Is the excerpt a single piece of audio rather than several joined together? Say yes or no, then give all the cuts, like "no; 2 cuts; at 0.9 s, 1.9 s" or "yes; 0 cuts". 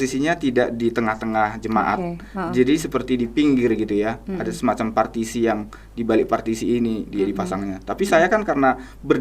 yes; 0 cuts